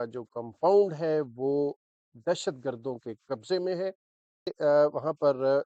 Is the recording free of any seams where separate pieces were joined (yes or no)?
no